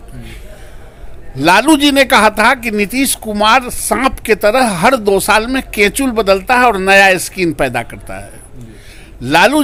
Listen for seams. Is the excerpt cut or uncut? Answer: uncut